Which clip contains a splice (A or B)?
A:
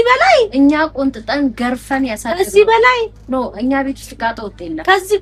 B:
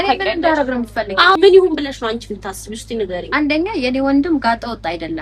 B